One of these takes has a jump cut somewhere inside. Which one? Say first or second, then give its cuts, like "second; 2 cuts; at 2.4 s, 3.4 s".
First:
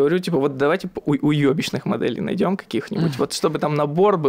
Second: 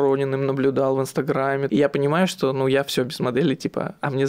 second; 1 cut; at 1.7 s